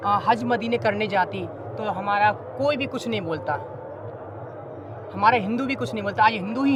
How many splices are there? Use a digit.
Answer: 0